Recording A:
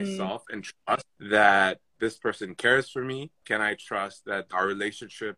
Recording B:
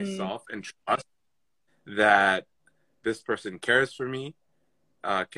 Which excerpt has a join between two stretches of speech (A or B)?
A